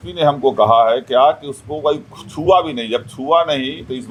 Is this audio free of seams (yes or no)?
yes